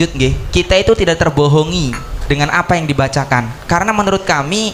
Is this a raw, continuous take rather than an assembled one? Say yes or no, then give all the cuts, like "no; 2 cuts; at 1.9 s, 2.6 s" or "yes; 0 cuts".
yes; 0 cuts